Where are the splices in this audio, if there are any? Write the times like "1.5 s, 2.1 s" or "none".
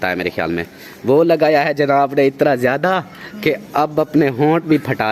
none